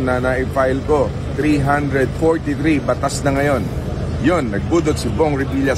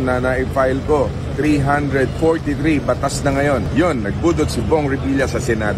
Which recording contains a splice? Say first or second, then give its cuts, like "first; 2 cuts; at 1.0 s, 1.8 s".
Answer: second; 1 cut; at 3.7 s